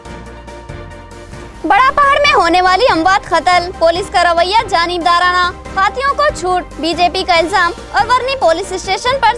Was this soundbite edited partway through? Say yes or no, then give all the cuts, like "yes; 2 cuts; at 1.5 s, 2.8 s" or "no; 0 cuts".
no; 0 cuts